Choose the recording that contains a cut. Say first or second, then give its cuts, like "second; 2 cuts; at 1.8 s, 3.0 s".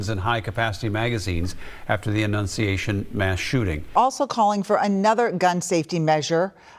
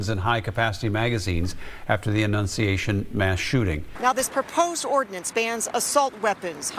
first; 1 cut; at 3.9 s